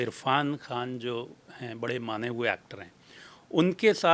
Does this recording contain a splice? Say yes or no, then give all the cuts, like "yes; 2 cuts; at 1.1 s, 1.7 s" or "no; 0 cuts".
no; 0 cuts